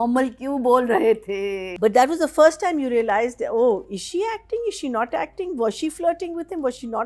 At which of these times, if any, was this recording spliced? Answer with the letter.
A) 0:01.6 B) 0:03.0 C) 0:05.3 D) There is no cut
A